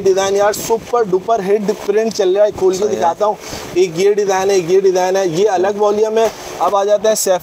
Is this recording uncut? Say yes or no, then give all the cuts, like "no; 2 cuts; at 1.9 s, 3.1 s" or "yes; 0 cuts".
no; 1 cut; at 6.4 s